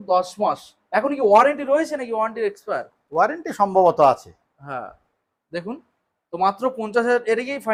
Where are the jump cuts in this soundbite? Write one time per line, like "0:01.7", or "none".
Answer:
none